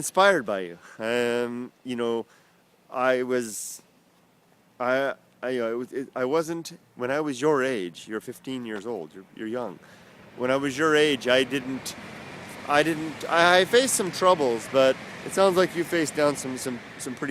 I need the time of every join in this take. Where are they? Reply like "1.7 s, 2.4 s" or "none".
2.1 s